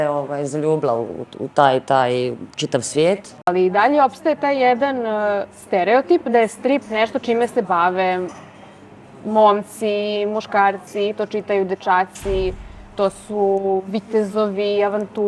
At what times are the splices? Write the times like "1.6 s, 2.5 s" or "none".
3.5 s